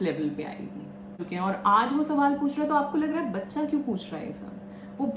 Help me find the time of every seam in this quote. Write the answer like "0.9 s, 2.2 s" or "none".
1.2 s